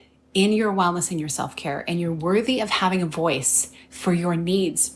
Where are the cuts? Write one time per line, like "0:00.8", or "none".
none